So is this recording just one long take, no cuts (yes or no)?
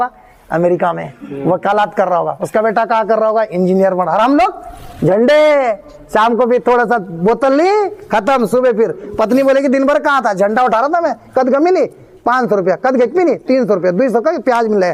yes